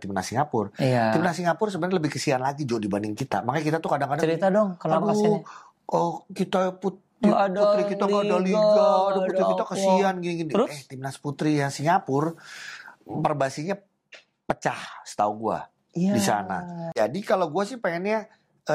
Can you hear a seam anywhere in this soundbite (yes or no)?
yes